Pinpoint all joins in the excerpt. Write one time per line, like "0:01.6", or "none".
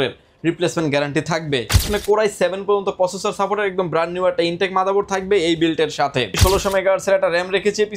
0:01.9
0:06.4